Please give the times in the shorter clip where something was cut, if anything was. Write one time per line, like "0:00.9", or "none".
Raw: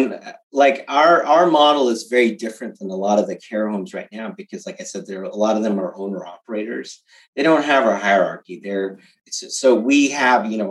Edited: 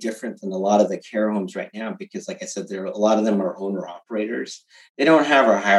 none